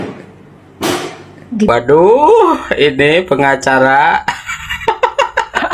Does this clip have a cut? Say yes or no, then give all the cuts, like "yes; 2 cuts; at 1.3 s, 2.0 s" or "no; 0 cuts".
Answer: yes; 1 cut; at 1.7 s